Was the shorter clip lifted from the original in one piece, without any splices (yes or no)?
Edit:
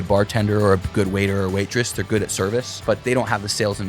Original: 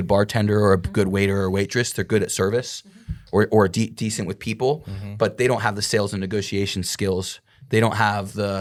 no